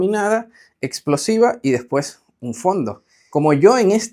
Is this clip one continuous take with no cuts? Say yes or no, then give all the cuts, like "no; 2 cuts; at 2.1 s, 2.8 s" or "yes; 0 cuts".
no; 1 cut; at 3.2 s